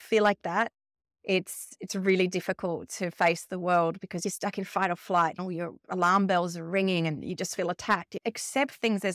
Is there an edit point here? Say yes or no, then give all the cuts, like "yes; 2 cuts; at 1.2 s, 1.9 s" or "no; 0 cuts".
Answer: yes; 2 cuts; at 5.4 s, 8.1 s